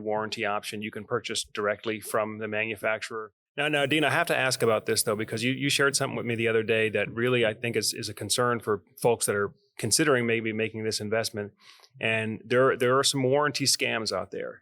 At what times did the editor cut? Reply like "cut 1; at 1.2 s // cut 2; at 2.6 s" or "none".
cut 1; at 3.1 s